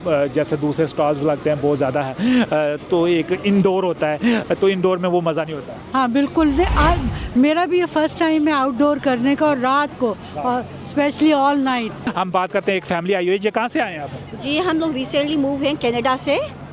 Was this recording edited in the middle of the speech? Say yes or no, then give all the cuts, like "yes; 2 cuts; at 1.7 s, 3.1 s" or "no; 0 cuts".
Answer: yes; 1 cut; at 12.1 s